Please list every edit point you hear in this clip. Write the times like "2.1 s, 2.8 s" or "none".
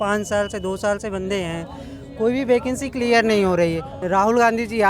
3.9 s